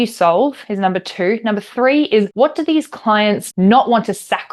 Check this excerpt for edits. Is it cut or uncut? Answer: cut